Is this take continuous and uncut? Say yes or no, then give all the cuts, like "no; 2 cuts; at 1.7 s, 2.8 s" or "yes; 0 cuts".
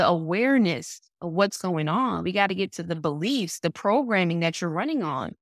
yes; 0 cuts